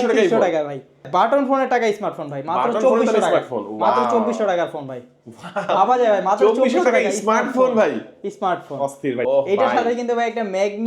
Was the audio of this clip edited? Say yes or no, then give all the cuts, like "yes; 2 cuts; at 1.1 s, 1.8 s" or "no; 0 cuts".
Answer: yes; 2 cuts; at 1.1 s, 9.3 s